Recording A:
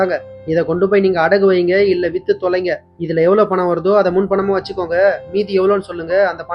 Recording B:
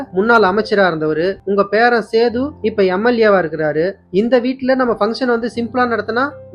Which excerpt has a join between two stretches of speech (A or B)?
B